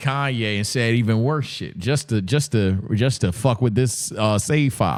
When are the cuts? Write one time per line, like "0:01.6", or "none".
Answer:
none